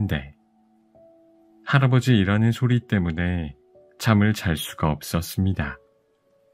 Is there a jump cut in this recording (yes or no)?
no